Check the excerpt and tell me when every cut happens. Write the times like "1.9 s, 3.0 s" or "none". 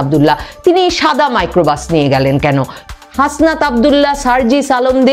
2.8 s